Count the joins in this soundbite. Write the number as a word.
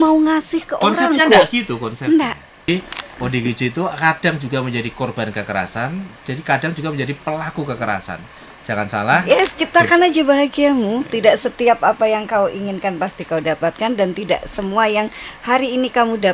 two